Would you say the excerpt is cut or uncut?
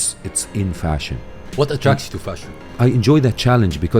cut